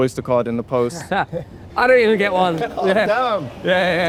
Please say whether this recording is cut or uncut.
uncut